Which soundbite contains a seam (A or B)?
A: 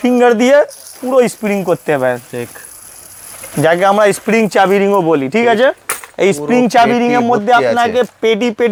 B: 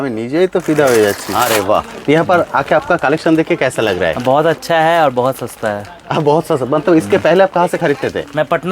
B